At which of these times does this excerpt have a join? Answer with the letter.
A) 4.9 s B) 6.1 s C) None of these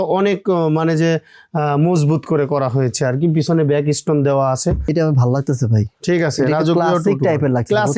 A